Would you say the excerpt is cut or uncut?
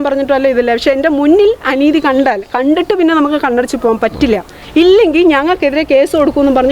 uncut